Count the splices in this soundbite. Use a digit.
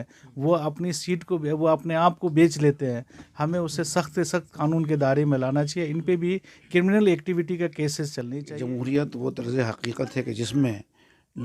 1